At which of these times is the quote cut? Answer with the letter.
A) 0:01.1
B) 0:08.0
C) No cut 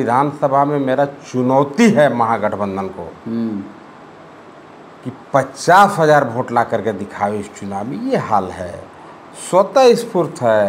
C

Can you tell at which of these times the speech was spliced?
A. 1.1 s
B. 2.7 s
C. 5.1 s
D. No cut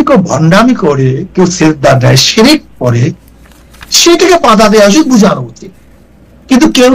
D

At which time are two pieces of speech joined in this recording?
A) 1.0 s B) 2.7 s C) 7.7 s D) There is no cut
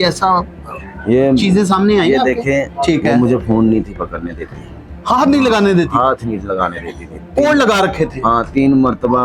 B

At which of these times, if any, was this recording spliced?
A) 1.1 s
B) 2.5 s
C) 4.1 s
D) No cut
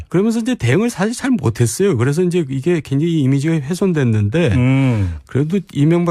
C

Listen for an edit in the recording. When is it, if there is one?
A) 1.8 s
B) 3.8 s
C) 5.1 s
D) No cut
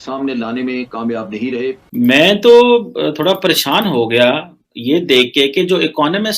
A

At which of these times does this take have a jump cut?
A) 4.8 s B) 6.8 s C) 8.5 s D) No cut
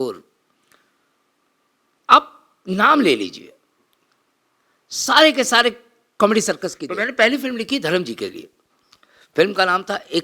B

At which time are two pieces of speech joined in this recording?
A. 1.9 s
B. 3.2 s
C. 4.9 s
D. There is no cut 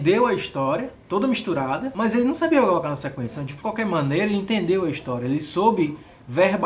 A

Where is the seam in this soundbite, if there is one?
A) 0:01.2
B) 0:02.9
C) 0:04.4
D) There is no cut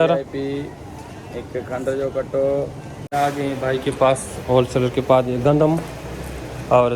B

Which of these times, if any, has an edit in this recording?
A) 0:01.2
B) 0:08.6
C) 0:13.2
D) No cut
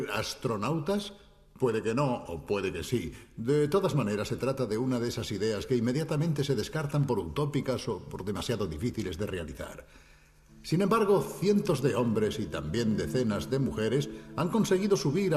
B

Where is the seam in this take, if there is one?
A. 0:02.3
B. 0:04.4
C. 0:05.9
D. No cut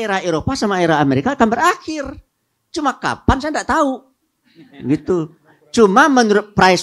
D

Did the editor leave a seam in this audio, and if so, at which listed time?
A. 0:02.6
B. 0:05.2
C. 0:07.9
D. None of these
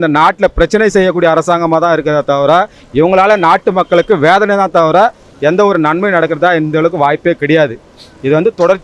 D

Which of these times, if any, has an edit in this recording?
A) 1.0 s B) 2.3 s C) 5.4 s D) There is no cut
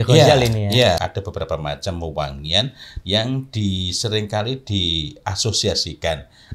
A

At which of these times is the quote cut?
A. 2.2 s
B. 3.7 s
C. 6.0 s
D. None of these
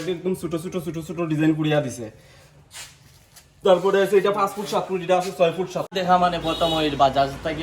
C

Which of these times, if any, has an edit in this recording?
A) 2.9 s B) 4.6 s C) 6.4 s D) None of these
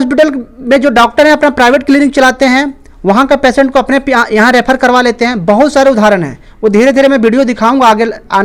D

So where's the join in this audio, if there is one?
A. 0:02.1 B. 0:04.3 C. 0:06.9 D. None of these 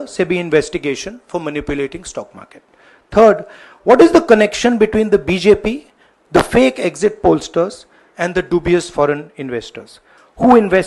D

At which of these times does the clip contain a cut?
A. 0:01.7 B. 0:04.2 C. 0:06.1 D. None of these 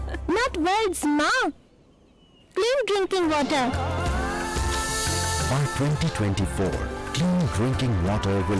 D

